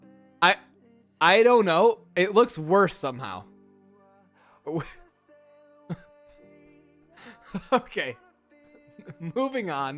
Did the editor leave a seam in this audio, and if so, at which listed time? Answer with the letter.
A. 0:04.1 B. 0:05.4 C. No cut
C